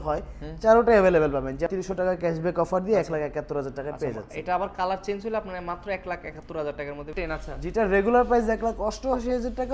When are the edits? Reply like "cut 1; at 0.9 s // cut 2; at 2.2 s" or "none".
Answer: cut 1; at 1.7 s // cut 2; at 7.1 s

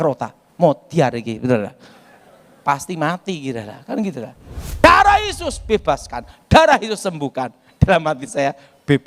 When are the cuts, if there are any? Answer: cut 1; at 4.8 s

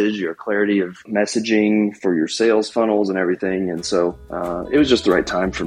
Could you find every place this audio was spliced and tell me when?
cut 1; at 1.0 s // cut 2; at 4.3 s

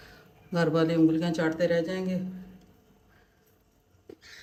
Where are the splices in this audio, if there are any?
none

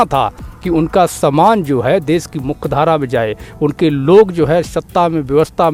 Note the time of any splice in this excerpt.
none

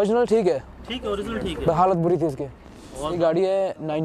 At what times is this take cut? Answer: cut 1; at 3.2 s

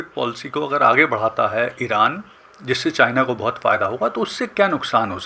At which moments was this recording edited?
none

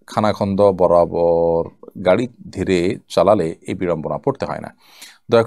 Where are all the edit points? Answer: none

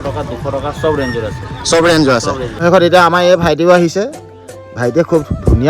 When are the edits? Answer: cut 1; at 2.6 s

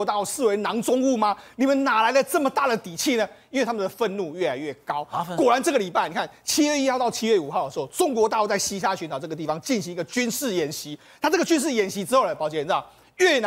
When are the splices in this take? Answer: none

